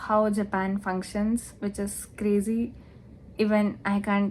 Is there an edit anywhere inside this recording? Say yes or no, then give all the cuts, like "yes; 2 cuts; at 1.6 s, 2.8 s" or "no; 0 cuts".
no; 0 cuts